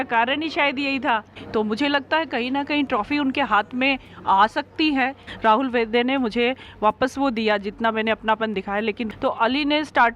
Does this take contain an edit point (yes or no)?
yes